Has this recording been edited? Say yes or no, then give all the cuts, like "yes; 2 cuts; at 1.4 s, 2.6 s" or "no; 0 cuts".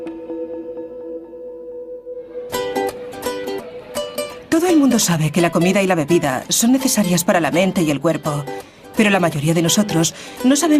yes; 1 cut; at 5.8 s